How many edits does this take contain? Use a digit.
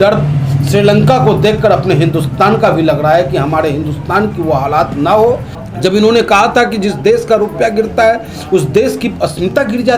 1